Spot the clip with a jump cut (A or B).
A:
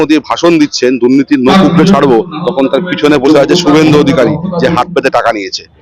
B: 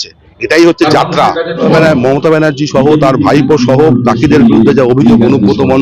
B